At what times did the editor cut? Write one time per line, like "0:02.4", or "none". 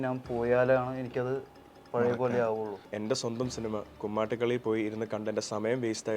0:02.9